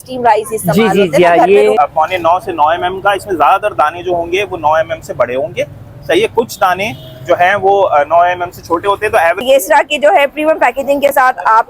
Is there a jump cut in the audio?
yes; 2 cuts; at 1.8 s, 9.4 s

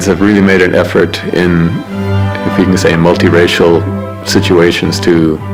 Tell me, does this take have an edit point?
no; 0 cuts

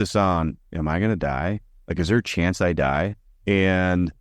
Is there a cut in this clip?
no; 0 cuts

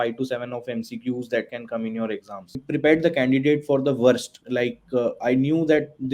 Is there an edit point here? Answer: yes; 1 cut; at 2.5 s

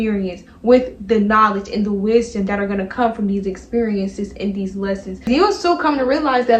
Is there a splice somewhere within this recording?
yes; 1 cut; at 5.2 s

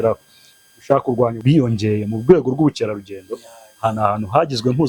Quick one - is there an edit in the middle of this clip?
yes; 1 cut; at 1.4 s

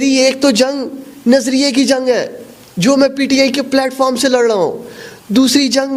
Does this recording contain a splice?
no; 0 cuts

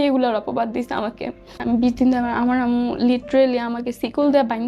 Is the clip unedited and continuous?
no; 1 cut; at 1.6 s

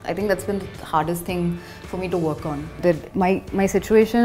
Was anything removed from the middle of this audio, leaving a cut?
yes; 1 cut; at 2.8 s

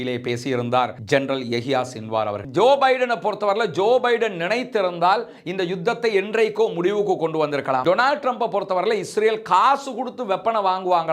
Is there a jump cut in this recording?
yes; 2 cuts; at 2.5 s, 7.8 s

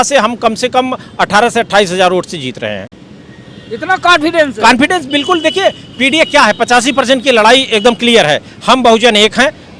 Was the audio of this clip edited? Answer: no; 0 cuts

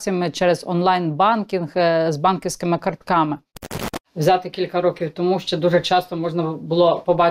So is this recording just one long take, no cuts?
no; 1 cut; at 3.6 s

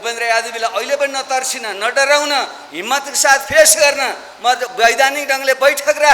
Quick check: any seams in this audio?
no; 0 cuts

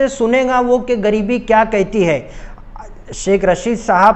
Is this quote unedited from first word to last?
yes; 0 cuts

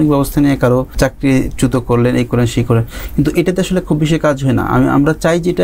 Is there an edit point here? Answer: yes; 1 cut; at 0.9 s

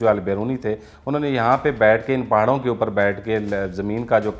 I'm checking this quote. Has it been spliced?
no; 0 cuts

